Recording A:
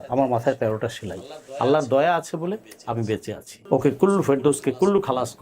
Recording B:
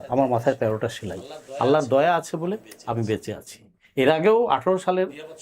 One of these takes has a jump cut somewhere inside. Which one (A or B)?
A